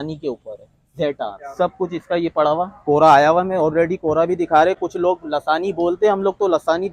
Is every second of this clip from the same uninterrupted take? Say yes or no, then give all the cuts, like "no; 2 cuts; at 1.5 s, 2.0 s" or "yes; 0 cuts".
yes; 0 cuts